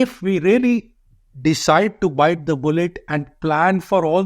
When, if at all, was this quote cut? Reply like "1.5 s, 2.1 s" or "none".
none